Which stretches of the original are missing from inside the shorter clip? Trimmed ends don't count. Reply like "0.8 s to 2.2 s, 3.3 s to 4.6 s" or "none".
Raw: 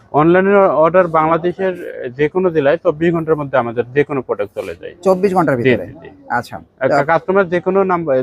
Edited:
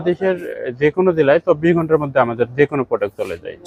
none